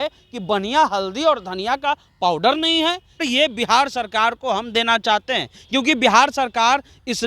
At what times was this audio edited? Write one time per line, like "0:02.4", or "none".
0:03.2